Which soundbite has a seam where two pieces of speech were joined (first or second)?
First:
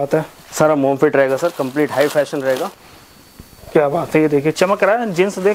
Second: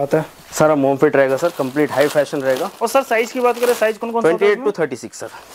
first